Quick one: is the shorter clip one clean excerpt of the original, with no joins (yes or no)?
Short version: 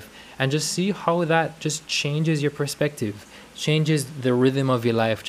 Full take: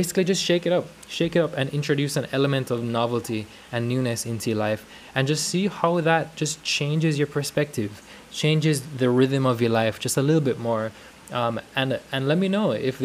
yes